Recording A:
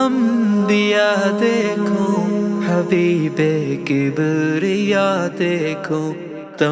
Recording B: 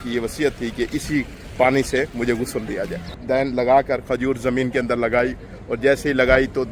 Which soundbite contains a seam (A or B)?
B